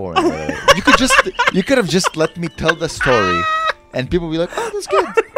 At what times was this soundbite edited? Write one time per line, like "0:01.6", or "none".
none